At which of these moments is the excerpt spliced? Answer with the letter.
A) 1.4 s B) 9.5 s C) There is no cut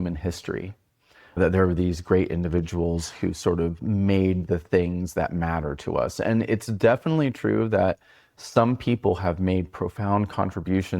A